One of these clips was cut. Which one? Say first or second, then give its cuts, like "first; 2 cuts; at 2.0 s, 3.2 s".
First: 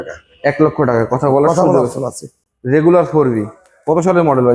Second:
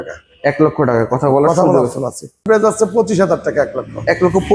second; 1 cut; at 2.4 s